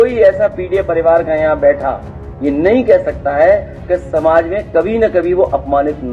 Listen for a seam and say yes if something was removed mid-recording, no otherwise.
no